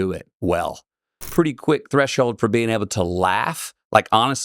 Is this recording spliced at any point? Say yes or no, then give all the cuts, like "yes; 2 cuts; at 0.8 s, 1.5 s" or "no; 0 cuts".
yes; 1 cut; at 1.2 s